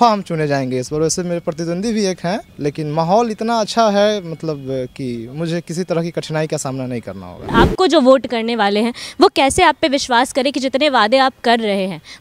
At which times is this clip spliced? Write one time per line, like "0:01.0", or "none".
0:02.5
0:07.5